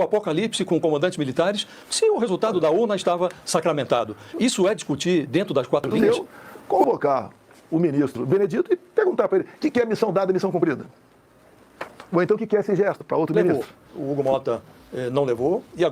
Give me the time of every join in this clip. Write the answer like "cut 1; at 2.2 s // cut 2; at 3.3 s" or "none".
cut 1; at 5.9 s // cut 2; at 13.4 s